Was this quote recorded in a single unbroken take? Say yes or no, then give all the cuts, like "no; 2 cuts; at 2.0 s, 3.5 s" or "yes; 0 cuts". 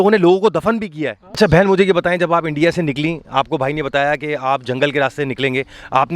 no; 1 cut; at 1.4 s